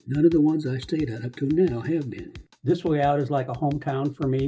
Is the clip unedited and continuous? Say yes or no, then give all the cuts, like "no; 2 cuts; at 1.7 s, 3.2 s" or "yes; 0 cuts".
no; 1 cut; at 2.5 s